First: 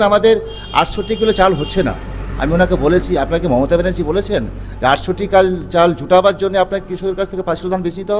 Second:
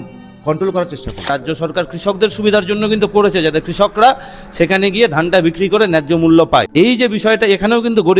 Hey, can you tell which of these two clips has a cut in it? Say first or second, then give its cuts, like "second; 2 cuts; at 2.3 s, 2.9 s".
second; 2 cuts; at 1.3 s, 6.7 s